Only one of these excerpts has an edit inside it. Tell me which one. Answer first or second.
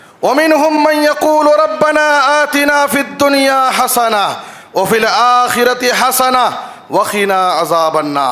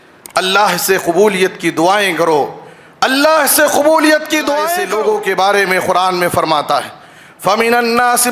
second